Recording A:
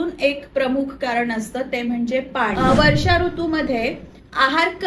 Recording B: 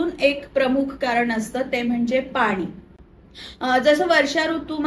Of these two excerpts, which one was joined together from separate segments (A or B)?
A